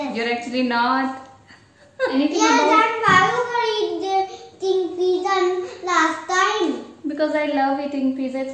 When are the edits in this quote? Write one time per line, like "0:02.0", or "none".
0:02.1